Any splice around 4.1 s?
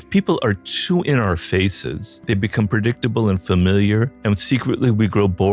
yes; 2 cuts; at 2.1 s, 4.1 s

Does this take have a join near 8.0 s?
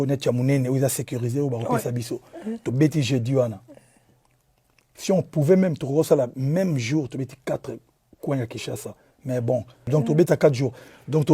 no; 1 cut; at 9.9 s

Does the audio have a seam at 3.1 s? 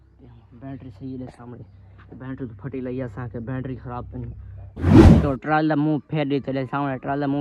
no; 2 cuts; at 4.8 s, 5.3 s

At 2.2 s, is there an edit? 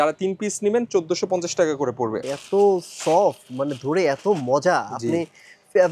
yes; 1 cut; at 2.2 s

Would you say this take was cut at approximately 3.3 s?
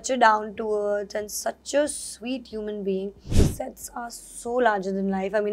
yes; 1 cut; at 3.3 s

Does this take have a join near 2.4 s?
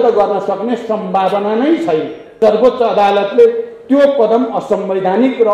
yes; 1 cut; at 2.4 s

